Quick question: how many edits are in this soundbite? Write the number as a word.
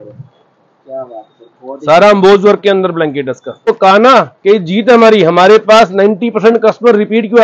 one